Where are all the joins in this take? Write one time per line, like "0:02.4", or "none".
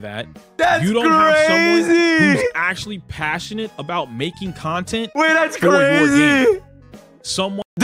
none